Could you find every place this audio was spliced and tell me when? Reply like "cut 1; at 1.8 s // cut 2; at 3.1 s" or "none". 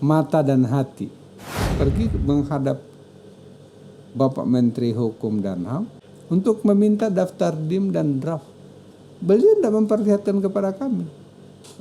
cut 1; at 1.7 s // cut 2; at 6.0 s